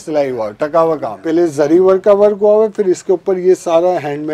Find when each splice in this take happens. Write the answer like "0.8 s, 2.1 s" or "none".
1.2 s